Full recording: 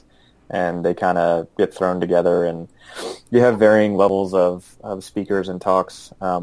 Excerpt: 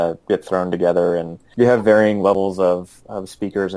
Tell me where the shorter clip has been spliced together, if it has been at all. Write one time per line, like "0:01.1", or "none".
0:01.4